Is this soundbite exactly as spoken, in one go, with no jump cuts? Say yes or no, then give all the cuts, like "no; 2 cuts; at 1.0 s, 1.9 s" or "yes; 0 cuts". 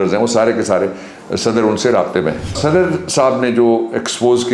no; 1 cut; at 2.6 s